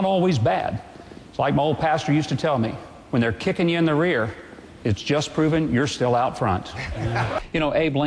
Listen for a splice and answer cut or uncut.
uncut